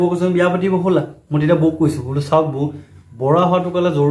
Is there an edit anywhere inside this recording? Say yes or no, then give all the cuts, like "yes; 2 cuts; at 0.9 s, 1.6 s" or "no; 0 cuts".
no; 0 cuts